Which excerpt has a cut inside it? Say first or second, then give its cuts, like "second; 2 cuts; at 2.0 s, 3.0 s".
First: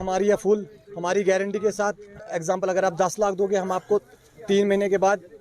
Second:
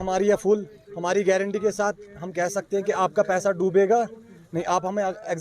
first; 1 cut; at 2.2 s